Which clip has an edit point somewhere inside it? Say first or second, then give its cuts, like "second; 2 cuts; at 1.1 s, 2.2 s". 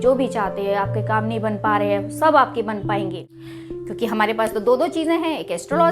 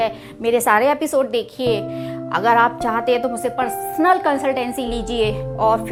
first; 1 cut; at 3.2 s